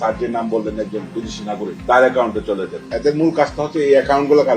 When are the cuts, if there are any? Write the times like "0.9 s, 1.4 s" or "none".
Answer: 2.9 s